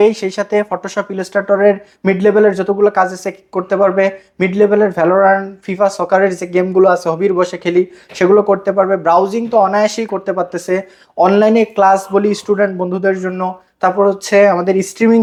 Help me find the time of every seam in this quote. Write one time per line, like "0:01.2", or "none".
none